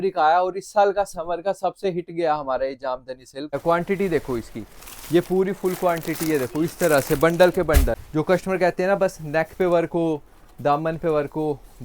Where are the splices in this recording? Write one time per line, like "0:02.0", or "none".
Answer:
0:03.5
0:08.0